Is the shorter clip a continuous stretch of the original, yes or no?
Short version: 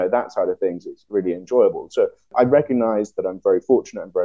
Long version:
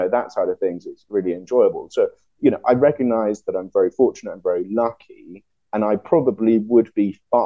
no